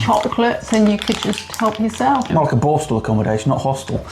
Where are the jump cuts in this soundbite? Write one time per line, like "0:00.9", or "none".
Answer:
0:02.3